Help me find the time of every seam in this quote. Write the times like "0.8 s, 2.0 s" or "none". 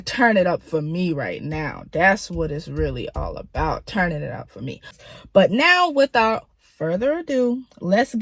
4.9 s